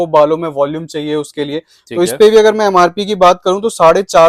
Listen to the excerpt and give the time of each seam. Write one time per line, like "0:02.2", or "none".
none

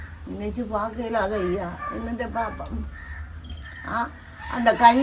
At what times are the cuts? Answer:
none

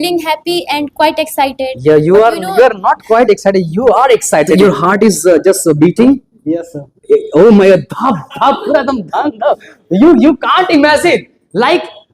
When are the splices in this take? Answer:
0:04.5

